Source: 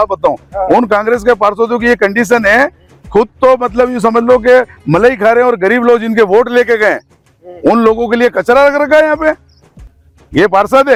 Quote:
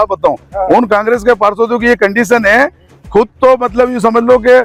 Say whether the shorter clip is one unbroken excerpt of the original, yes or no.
yes